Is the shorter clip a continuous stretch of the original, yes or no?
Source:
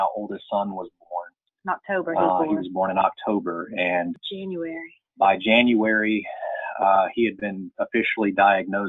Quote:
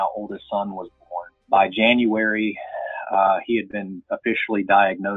no